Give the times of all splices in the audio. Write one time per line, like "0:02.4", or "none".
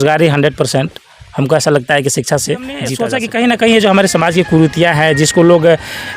0:03.0